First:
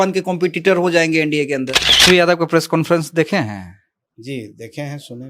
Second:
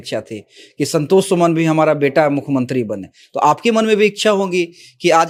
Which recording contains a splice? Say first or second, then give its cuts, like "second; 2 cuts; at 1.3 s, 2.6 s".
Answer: first; 1 cut; at 2.0 s